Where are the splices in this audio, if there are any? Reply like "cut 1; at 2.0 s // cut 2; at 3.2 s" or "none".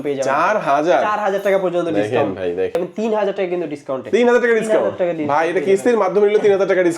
cut 1; at 2.8 s

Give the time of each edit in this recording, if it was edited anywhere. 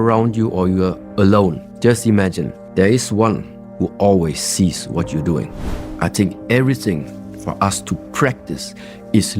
cut 1; at 2.5 s // cut 2; at 5.9 s

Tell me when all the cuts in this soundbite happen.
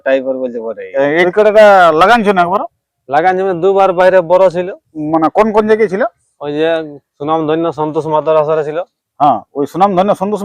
cut 1; at 1.3 s

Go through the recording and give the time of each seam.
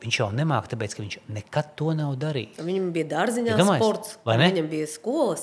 none

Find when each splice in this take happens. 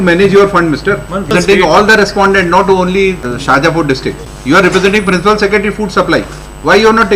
cut 1; at 1.3 s // cut 2; at 3.3 s // cut 3; at 4.3 s

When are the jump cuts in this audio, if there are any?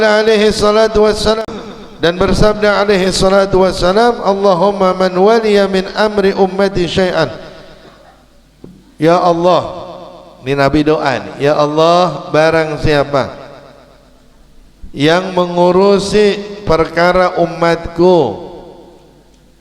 cut 1; at 1.4 s

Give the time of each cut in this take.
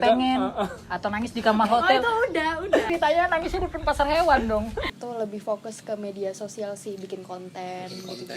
cut 1; at 4.9 s

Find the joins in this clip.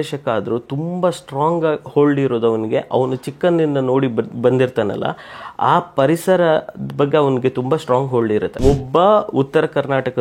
cut 1; at 8.6 s

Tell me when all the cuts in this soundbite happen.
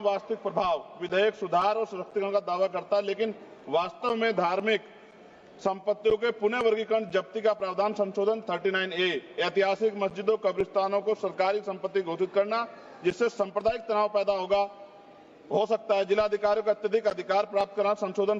none

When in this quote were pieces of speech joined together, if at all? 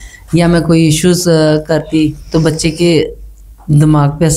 none

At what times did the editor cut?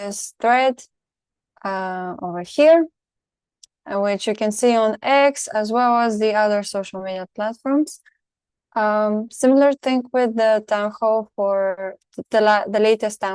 none

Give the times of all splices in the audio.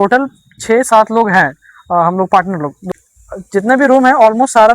cut 1; at 2.8 s

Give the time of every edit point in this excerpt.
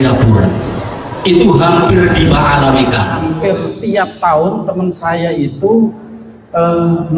cut 1; at 3.3 s

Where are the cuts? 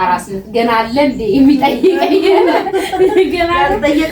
none

